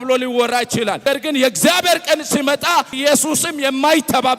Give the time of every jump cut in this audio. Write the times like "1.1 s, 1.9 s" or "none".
1.0 s, 3.0 s